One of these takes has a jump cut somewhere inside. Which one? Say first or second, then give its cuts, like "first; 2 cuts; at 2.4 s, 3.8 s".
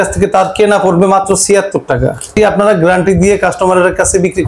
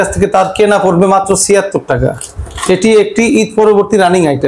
first; 1 cut; at 2.3 s